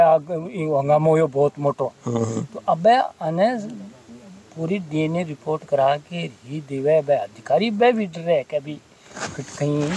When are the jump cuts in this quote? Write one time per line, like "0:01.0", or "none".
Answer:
none